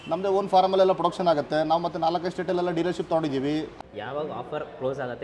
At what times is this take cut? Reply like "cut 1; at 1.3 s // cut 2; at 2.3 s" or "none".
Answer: cut 1; at 3.7 s